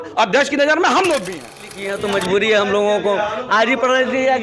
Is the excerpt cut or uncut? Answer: cut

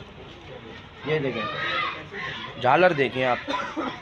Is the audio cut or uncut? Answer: uncut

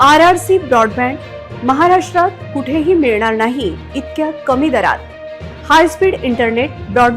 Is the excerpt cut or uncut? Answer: uncut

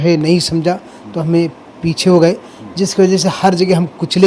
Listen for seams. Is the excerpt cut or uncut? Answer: uncut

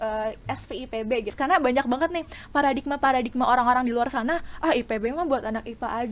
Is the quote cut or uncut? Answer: cut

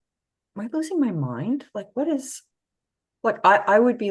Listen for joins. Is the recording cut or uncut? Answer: uncut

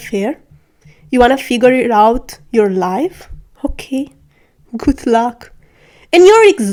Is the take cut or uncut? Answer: uncut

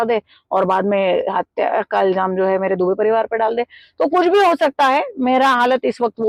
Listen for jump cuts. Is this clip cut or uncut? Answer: uncut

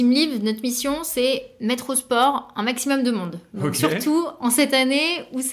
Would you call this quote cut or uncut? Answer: uncut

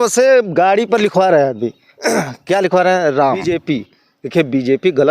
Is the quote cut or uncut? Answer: cut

